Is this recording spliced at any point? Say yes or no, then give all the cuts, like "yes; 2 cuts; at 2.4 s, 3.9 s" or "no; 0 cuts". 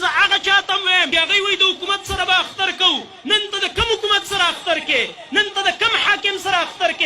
yes; 1 cut; at 1.1 s